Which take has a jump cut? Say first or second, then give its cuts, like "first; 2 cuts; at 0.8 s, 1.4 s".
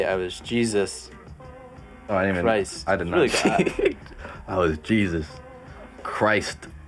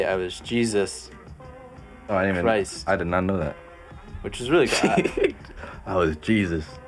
first; 1 cut; at 3.1 s